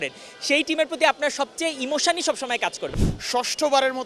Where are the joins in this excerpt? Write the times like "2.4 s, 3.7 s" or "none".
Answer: 2.8 s